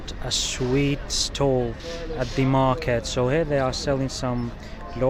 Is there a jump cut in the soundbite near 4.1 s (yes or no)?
no